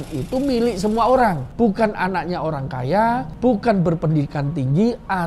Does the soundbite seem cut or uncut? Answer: cut